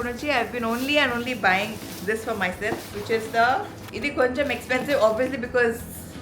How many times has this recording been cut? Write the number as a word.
one